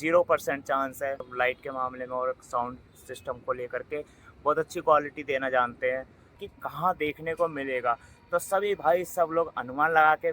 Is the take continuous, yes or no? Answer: no